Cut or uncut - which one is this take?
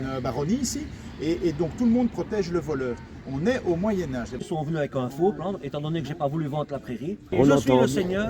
cut